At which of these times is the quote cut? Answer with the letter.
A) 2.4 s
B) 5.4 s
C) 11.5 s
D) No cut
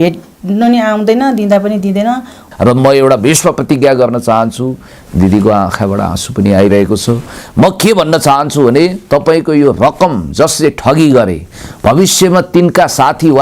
A